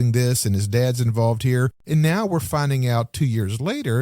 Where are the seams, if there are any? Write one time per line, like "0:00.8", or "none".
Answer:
0:01.8